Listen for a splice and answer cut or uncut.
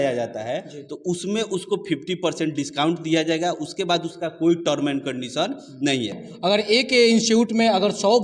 cut